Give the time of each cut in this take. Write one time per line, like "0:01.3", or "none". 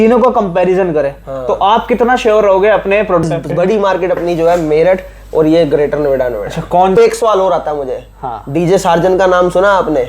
0:03.2
0:07.0